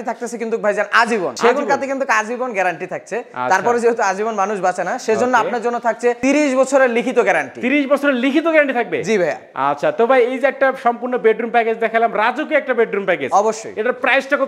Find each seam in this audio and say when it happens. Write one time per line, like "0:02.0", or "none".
none

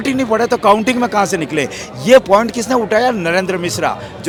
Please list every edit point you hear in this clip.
none

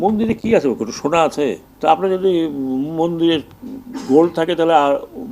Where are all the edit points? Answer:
0:01.7

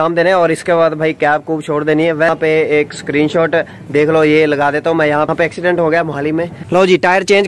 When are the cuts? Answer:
0:02.3
0:05.3
0:06.6

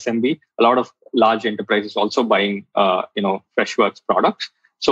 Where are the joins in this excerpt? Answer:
none

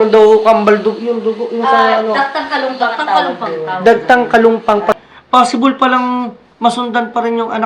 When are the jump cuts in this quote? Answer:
0:05.0

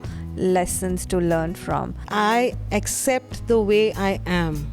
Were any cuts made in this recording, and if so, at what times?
0:02.0

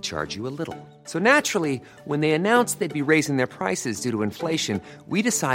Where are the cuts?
none

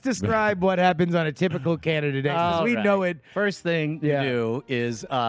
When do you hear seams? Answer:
0:03.3

